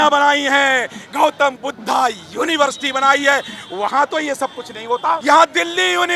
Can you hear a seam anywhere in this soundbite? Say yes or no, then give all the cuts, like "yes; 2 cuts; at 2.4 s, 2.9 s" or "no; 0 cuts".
yes; 1 cut; at 5.2 s